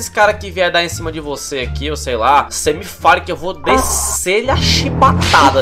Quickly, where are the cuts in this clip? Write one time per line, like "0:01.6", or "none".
none